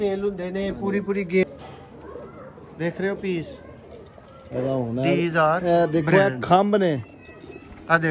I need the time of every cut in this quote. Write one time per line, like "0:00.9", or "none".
0:01.4